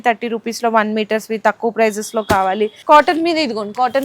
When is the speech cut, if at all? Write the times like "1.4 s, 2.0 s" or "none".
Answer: 2.7 s